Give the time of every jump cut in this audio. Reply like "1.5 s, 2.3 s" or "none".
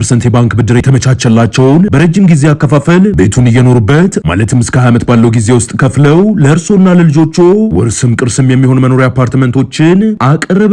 none